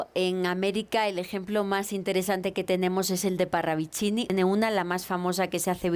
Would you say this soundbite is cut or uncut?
cut